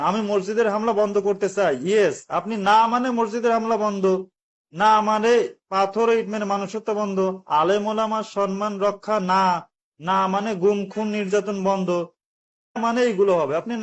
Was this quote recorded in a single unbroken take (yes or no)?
no